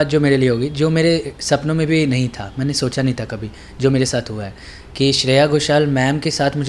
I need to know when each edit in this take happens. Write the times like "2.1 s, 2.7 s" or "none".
none